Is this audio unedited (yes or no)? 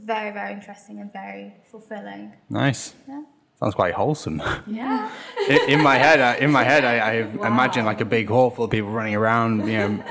yes